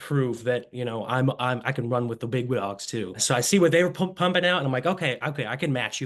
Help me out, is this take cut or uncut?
cut